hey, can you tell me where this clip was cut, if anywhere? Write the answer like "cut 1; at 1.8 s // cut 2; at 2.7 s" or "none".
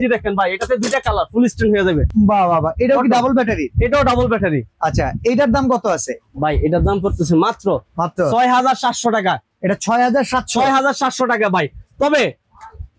none

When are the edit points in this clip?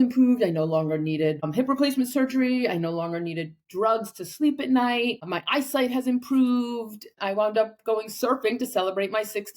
cut 1; at 1.5 s // cut 2; at 5.3 s // cut 3; at 7.1 s

